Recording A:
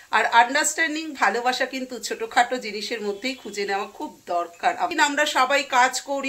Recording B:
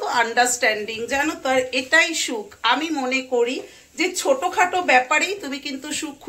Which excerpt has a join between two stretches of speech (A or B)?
A